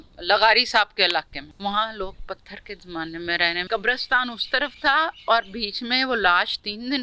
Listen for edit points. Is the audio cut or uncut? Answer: cut